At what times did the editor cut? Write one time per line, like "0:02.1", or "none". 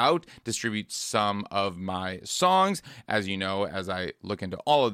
none

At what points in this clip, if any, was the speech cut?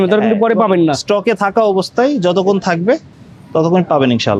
none

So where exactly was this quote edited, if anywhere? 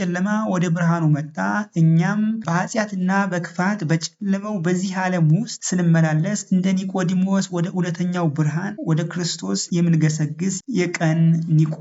0:02.4
0:08.8

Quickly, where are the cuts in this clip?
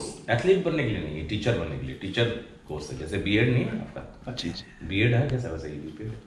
none

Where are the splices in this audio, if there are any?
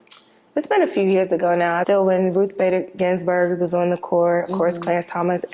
0:01.8

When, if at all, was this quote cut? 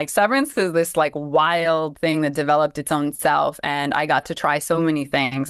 none

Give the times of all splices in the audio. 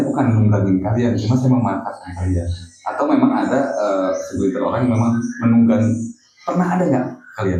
none

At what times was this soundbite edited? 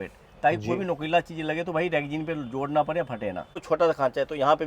0:03.6

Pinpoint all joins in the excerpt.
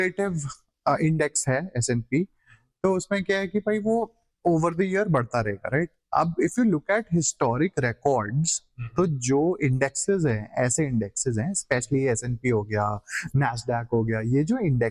none

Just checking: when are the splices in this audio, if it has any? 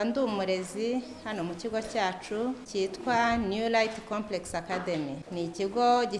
0:02.6
0:05.2

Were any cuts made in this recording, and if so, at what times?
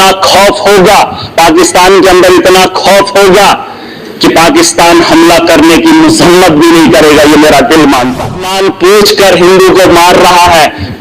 0:08.5

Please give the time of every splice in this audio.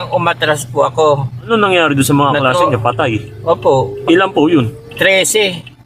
0:01.4

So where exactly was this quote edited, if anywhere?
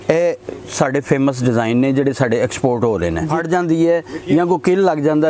0:03.3

